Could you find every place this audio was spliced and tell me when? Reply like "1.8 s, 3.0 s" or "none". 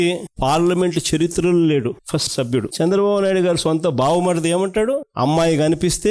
2.7 s